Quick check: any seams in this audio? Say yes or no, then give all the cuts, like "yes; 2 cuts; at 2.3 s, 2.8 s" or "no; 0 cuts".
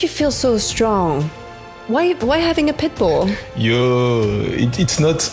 no; 0 cuts